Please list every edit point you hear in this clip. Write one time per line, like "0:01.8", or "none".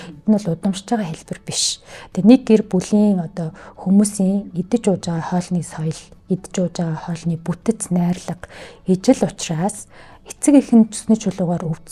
none